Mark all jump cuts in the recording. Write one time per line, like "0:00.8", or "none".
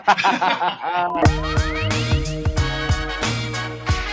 0:01.2